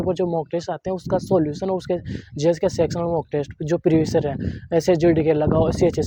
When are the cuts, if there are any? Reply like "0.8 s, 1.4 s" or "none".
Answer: none